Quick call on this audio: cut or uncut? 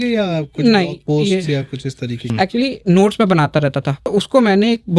cut